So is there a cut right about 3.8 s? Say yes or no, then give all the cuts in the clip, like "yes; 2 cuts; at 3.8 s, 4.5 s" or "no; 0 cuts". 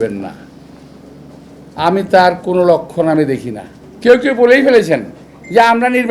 yes; 1 cut; at 3.8 s